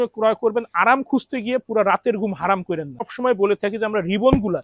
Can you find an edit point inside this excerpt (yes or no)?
yes